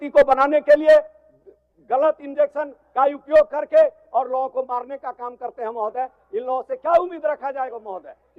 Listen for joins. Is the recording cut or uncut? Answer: uncut